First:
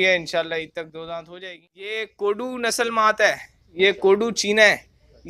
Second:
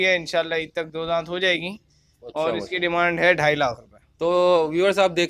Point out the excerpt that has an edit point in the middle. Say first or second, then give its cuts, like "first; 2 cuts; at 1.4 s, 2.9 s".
first; 1 cut; at 1.3 s